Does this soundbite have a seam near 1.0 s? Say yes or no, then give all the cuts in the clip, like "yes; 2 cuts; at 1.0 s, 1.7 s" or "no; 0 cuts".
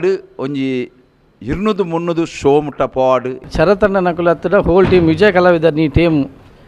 no; 1 cut; at 3.4 s